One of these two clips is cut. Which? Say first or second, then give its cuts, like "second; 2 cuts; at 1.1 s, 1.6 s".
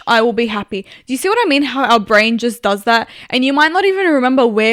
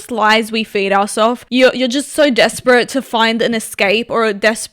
second; 1 cut; at 1.4 s